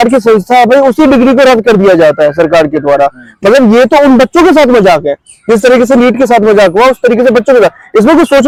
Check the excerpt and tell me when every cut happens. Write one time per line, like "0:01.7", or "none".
none